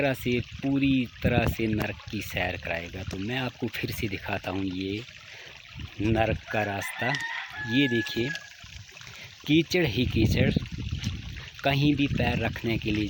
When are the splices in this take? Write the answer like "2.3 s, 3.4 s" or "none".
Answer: none